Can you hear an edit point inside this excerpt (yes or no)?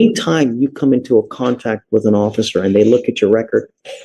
no